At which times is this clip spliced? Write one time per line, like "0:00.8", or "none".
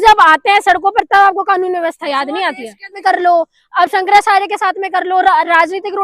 0:02.9